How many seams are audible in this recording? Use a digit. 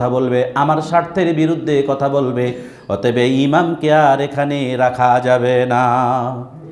0